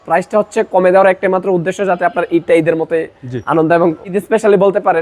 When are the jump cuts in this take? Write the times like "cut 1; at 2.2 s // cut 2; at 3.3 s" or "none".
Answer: cut 1; at 4.1 s